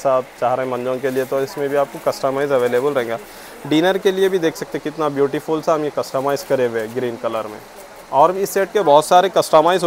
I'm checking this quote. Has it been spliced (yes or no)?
no